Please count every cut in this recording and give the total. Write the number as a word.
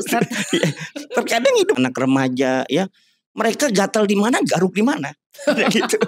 one